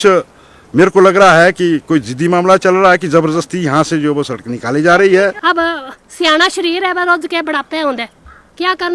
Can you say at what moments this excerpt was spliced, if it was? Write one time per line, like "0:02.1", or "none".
0:05.4